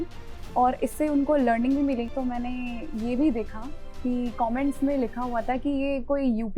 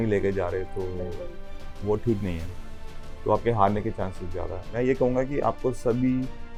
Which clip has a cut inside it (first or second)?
first